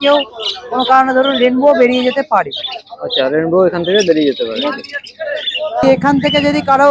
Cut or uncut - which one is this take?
cut